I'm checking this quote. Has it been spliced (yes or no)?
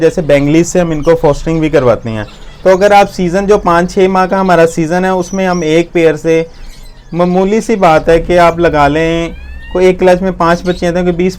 no